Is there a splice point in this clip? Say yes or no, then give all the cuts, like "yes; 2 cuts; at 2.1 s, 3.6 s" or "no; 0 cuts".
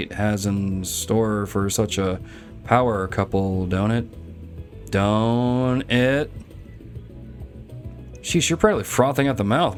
no; 0 cuts